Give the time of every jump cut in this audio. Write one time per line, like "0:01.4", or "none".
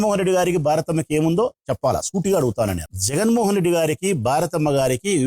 0:02.8